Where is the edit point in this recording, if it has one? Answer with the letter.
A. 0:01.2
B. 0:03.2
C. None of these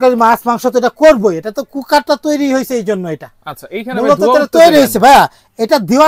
C